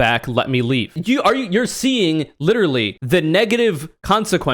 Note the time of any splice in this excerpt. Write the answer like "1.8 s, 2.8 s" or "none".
1.0 s, 3.0 s

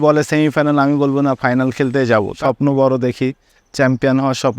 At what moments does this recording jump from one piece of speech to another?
2.3 s

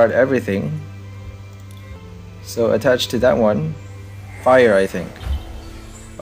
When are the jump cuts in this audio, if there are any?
2.0 s

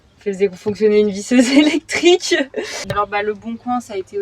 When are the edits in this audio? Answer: 2.9 s

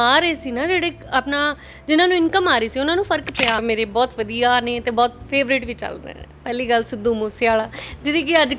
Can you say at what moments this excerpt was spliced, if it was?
3.6 s

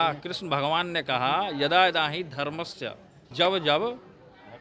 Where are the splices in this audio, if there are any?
3.2 s

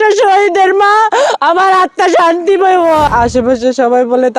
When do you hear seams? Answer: 3.1 s

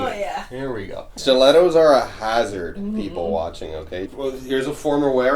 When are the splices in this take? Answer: 1.0 s, 4.1 s

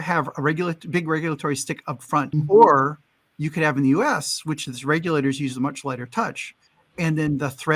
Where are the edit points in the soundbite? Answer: 2.3 s

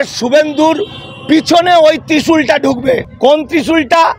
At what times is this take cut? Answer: none

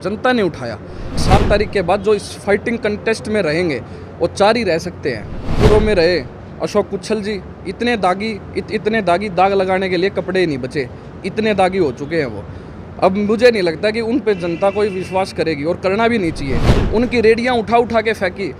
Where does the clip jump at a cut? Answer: 1.2 s, 5.4 s, 16.7 s

